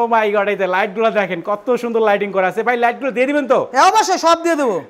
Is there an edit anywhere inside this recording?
no; 0 cuts

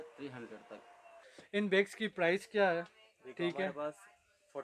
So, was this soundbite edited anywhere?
yes; 1 cut; at 1.1 s

